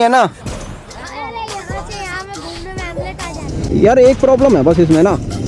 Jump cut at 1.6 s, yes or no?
no